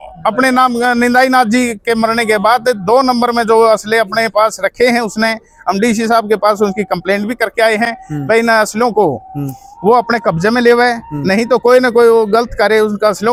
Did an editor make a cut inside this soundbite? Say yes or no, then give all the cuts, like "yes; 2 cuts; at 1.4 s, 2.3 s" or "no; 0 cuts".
no; 0 cuts